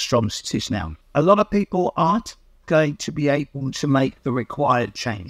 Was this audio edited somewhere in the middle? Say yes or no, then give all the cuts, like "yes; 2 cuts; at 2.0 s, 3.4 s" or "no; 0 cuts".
yes; 1 cut; at 1.0 s